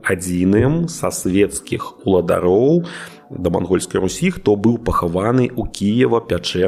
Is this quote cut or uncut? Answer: uncut